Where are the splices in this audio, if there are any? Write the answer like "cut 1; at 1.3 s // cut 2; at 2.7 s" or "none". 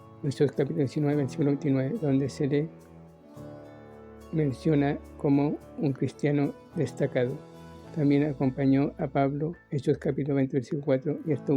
cut 1; at 2.8 s // cut 2; at 4.3 s

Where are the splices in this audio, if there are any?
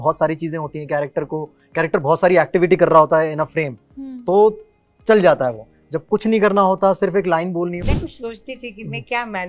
cut 1; at 7.8 s

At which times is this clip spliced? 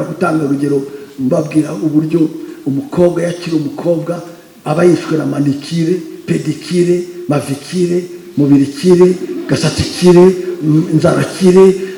none

